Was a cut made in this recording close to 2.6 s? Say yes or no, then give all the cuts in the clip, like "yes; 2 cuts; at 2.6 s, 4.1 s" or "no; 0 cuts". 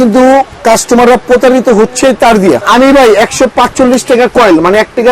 yes; 1 cut; at 2.6 s